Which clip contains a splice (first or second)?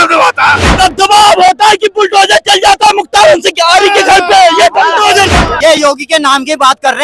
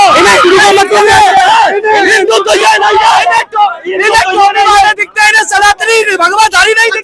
first